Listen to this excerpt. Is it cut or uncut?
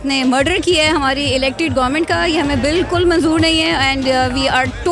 uncut